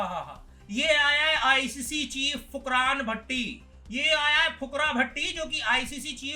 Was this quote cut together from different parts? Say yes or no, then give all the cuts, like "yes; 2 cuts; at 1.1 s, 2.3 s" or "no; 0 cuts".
no; 0 cuts